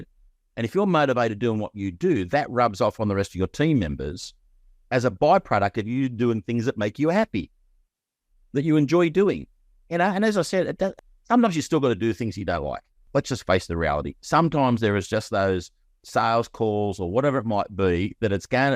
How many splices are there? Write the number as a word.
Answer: two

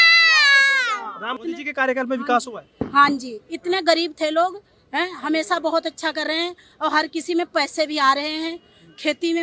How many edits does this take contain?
one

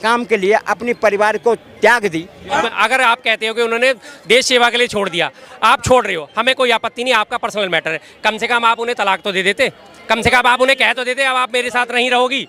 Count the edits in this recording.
one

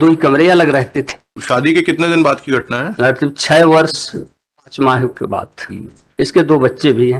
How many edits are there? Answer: one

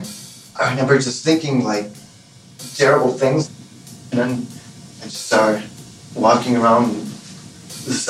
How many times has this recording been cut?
one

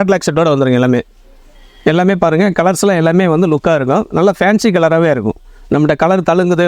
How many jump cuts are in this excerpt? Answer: zero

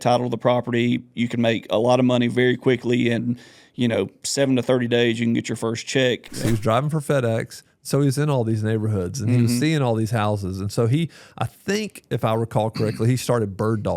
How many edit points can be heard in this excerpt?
one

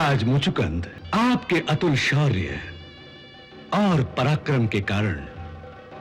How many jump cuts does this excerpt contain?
one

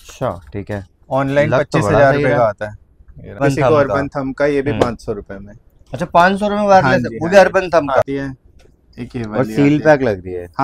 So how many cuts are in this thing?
two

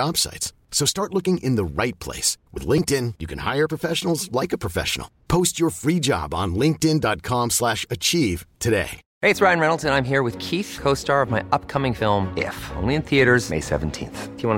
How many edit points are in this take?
one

